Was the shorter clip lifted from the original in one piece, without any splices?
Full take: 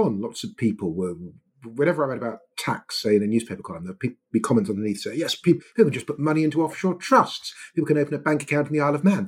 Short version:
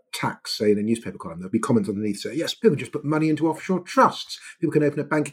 no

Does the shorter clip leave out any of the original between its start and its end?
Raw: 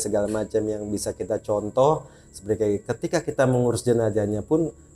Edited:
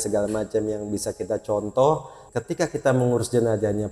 yes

